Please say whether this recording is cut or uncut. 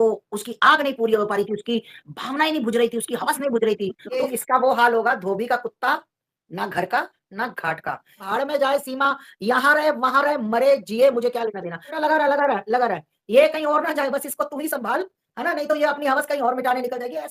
cut